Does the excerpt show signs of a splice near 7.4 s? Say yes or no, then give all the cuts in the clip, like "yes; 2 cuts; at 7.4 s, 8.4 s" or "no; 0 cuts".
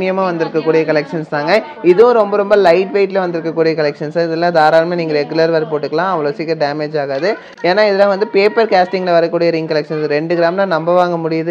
no; 0 cuts